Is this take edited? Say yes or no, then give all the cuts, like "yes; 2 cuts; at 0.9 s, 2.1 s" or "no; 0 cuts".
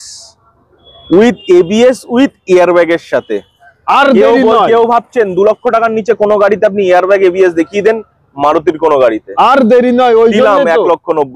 no; 0 cuts